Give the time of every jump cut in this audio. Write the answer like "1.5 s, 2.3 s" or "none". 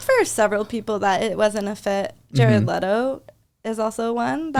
none